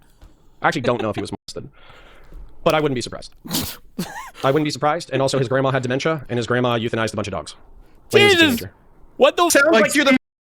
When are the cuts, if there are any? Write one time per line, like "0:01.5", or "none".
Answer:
0:09.5